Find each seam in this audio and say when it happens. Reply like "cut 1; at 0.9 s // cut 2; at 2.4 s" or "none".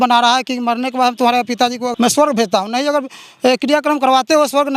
cut 1; at 1.9 s